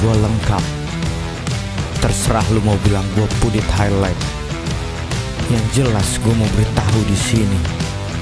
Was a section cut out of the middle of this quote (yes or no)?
no